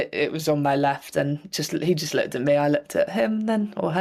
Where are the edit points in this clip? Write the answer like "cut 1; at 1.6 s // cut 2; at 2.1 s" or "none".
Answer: none